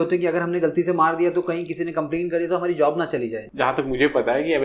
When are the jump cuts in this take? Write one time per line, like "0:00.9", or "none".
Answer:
0:03.5